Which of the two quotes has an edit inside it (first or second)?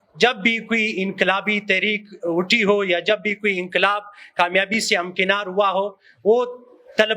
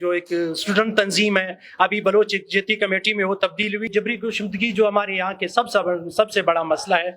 second